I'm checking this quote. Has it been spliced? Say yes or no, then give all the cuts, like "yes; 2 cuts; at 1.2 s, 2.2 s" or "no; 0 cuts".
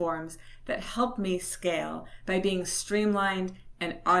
no; 0 cuts